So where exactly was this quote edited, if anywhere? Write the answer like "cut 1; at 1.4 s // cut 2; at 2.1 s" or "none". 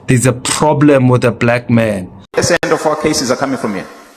none